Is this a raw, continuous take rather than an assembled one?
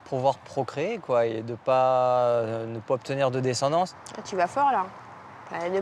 no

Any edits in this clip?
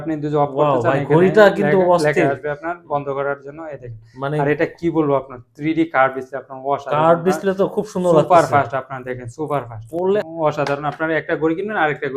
yes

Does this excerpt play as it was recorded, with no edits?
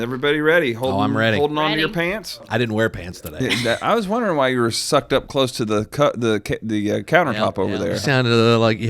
no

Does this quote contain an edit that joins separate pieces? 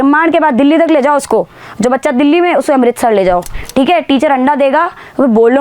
yes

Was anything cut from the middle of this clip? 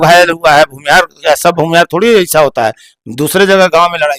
no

